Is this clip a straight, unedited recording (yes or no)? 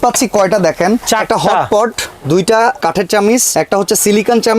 no